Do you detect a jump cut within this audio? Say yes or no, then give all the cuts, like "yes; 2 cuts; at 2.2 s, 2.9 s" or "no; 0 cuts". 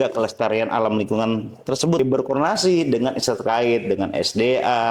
yes; 1 cut; at 2.0 s